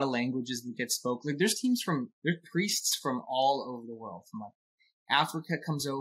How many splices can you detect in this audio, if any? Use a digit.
0